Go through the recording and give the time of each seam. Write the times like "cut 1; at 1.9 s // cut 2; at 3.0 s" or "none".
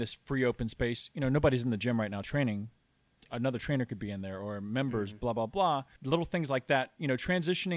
cut 1; at 5.9 s